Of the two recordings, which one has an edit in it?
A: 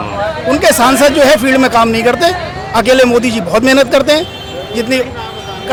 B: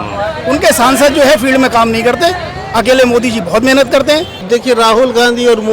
B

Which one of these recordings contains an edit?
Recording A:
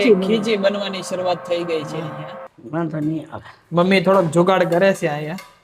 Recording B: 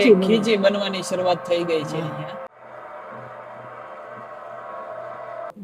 A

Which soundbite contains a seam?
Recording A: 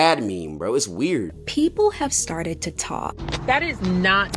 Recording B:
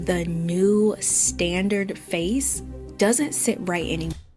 A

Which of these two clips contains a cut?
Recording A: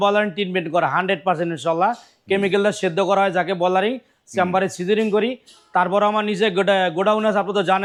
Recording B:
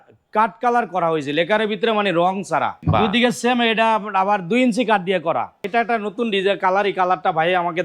B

